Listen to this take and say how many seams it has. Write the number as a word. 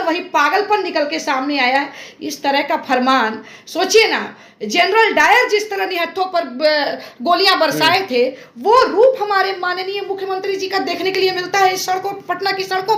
zero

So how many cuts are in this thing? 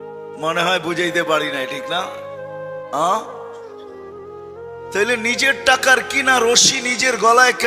two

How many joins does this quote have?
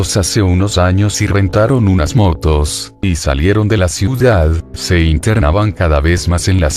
one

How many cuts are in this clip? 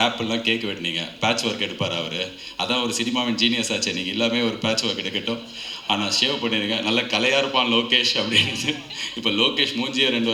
zero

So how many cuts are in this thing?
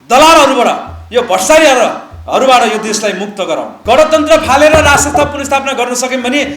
one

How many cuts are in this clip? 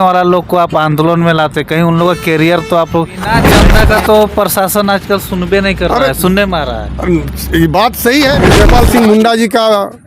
two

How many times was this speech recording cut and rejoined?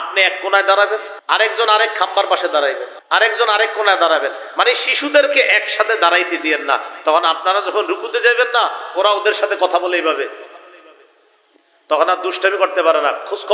two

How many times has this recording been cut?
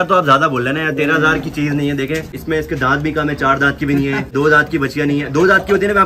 two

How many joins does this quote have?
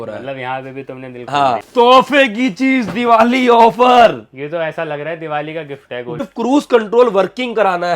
two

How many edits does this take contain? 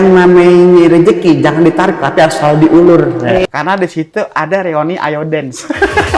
one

